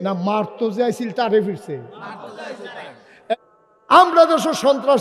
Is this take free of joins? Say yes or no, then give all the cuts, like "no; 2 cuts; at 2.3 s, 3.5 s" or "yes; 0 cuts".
no; 1 cut; at 3.3 s